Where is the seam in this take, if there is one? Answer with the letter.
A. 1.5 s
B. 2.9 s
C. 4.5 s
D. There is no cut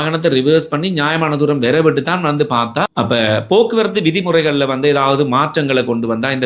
B